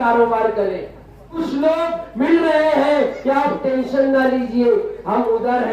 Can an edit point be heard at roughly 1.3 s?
yes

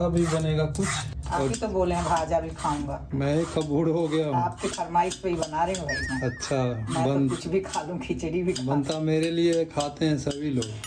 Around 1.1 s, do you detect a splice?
yes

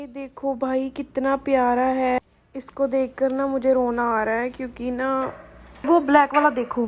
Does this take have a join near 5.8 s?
yes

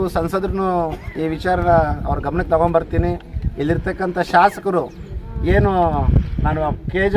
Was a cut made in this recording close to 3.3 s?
no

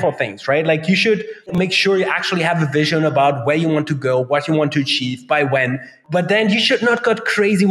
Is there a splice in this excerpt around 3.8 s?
no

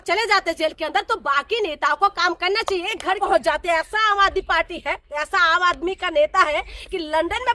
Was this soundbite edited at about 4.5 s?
no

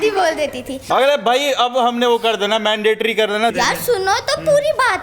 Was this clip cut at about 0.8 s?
yes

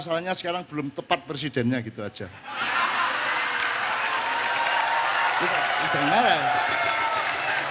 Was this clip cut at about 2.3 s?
no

